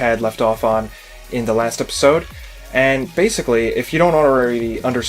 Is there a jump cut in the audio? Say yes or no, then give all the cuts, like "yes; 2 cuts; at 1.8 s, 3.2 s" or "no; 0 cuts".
yes; 1 cut; at 3.0 s